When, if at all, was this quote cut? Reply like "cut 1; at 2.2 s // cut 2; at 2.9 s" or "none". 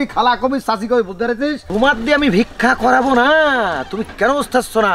cut 1; at 1.6 s

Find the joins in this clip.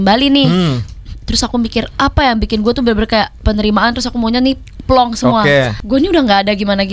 cut 1; at 5.8 s

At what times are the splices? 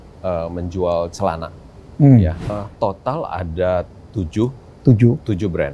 cut 1; at 2.5 s

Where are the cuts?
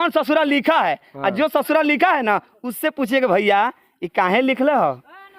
none

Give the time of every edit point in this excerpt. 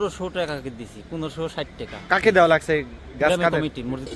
none

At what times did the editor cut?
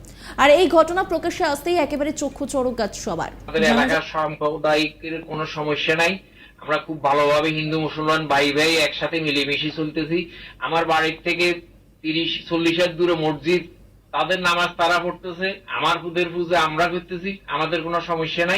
cut 1; at 3.5 s

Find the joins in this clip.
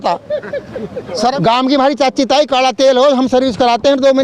cut 1; at 1.3 s

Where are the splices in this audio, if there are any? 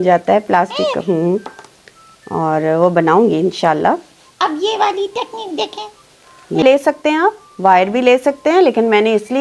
cut 1; at 6.6 s

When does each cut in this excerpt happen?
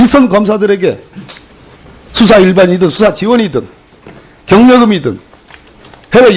cut 1; at 0.9 s

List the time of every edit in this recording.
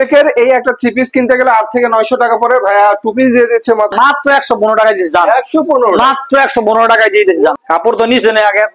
cut 1; at 3.9 s // cut 2; at 7.5 s

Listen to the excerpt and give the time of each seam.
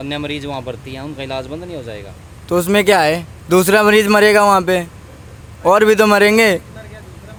none

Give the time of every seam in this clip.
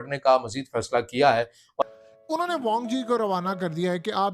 cut 1; at 1.8 s

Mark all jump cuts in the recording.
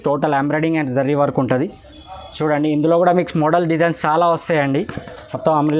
cut 1; at 4.7 s

